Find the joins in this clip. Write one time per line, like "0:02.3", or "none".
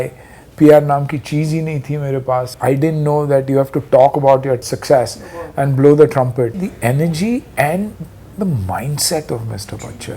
0:02.5
0:04.7
0:06.7
0:08.2